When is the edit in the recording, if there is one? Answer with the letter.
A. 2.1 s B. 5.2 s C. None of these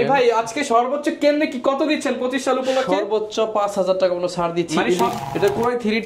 B